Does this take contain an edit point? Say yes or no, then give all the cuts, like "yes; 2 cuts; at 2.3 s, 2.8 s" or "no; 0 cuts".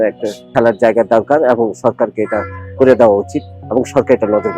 no; 0 cuts